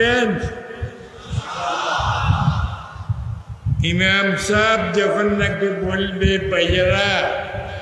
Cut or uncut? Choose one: uncut